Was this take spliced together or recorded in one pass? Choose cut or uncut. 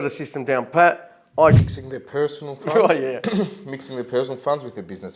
cut